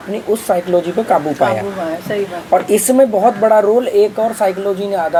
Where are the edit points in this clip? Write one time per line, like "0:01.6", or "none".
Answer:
none

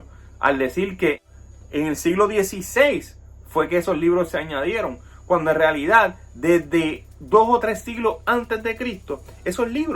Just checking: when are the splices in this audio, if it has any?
0:01.3

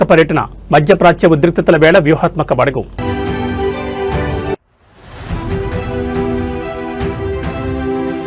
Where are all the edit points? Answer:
none

